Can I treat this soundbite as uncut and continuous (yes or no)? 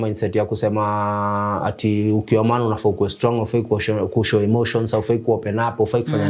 yes